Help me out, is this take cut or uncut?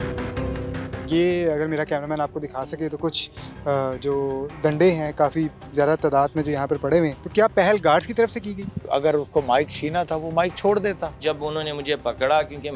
cut